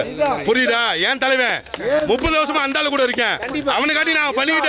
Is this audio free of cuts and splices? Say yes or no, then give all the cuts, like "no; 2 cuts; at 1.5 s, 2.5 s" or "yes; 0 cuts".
yes; 0 cuts